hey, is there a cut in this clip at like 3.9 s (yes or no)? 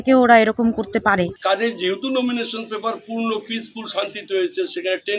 no